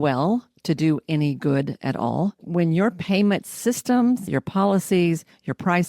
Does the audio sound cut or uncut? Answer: cut